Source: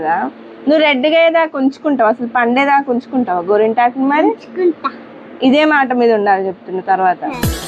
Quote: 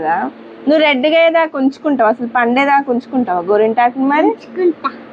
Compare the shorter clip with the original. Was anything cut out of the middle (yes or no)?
no